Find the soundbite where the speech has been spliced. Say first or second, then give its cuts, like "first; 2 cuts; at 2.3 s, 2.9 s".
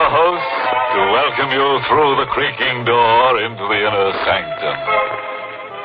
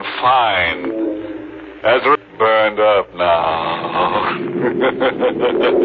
second; 1 cut; at 2.2 s